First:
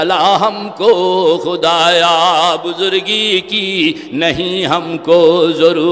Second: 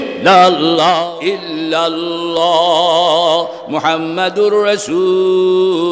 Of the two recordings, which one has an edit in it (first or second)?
second